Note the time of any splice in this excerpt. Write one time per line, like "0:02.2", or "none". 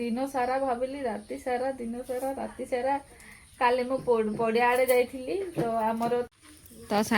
0:06.3